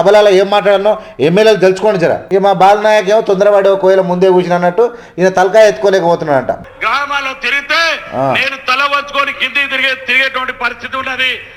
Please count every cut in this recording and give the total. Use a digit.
2